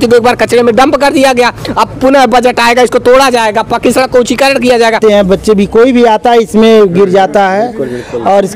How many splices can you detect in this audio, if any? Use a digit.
1